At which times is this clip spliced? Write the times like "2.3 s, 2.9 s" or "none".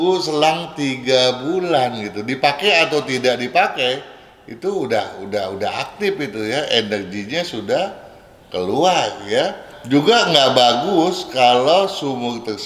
9.7 s